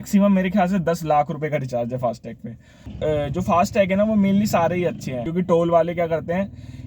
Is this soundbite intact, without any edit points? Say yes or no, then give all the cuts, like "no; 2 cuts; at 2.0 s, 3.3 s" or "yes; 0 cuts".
no; 2 cuts; at 2.9 s, 5.2 s